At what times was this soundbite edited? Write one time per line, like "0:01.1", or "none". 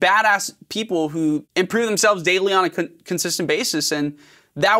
0:01.5